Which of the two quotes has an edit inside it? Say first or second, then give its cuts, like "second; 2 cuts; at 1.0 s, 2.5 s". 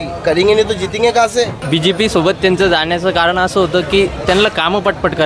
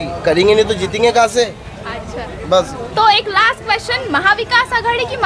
first; 1 cut; at 1.6 s